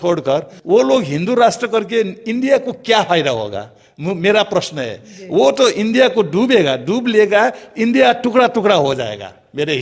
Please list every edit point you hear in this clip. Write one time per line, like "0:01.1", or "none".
none

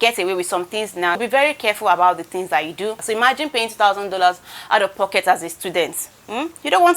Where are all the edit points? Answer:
0:01.2
0:03.0

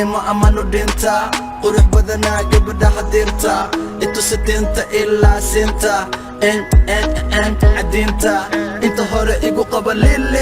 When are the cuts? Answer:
none

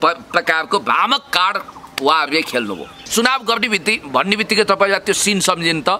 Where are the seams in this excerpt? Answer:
0:03.1

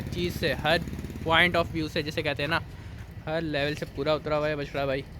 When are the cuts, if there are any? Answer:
none

